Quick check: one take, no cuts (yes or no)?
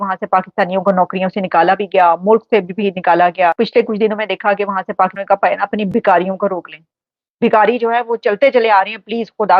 no